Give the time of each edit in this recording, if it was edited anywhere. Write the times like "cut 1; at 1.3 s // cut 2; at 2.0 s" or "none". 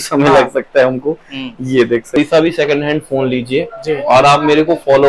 cut 1; at 2.2 s